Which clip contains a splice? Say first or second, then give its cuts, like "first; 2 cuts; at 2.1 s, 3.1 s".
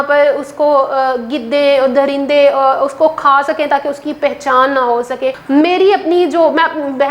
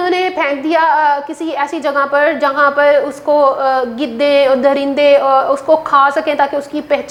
first; 1 cut; at 5.4 s